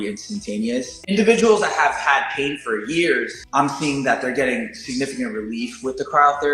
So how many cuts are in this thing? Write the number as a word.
two